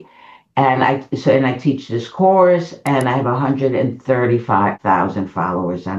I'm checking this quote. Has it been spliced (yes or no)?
yes